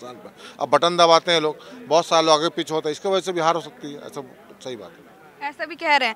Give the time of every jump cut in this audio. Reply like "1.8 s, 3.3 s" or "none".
none